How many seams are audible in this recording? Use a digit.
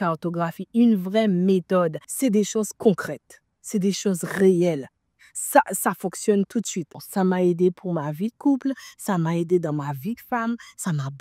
2